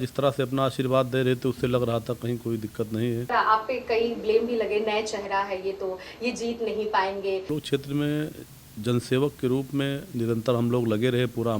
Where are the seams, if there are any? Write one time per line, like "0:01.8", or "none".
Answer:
0:03.3
0:07.5